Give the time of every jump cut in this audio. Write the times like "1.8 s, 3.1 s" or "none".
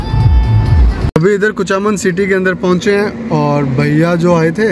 none